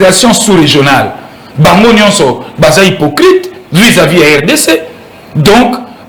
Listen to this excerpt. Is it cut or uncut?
uncut